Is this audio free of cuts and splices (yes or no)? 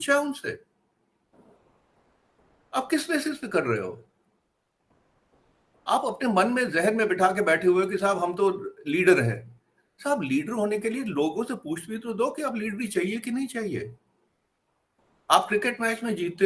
yes